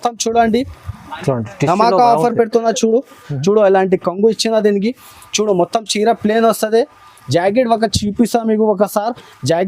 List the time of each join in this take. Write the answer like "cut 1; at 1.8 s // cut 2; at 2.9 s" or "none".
cut 1; at 3.2 s

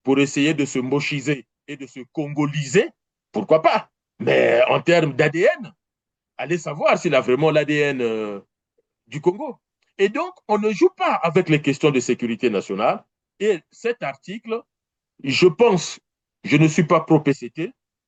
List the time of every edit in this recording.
none

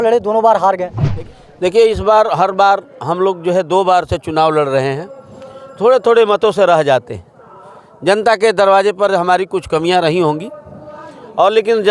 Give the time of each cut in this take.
cut 1; at 1.1 s

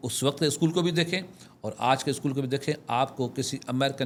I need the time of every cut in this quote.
none

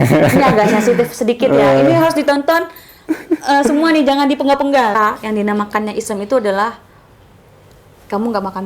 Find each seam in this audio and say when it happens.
cut 1; at 5.0 s

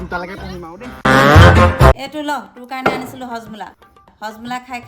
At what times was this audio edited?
cut 1; at 2.0 s

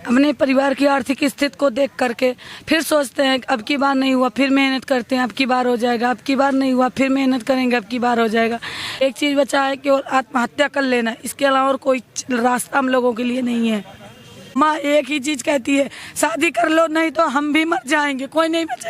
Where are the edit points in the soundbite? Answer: cut 1; at 9.0 s // cut 2; at 14.6 s

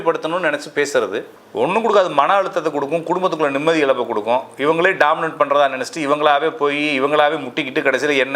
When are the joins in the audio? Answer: cut 1; at 1.3 s

